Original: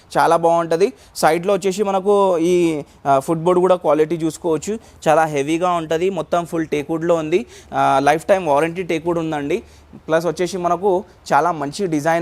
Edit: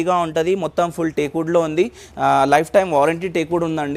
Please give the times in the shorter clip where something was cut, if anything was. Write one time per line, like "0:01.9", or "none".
none

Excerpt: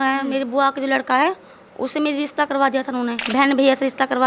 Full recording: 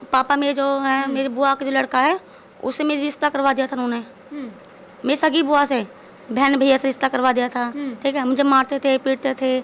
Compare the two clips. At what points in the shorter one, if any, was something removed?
0:03.2

